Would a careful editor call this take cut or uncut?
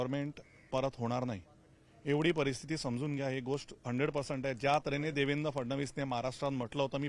uncut